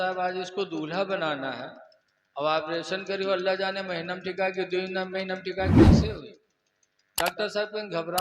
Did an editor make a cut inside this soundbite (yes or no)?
yes